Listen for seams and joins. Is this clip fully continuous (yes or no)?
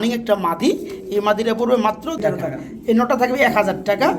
no